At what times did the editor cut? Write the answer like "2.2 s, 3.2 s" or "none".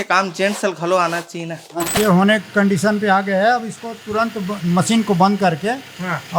1.9 s